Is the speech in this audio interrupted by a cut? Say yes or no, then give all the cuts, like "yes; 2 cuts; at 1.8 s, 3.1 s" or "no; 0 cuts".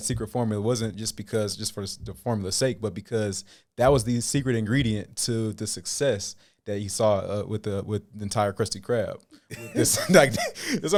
no; 0 cuts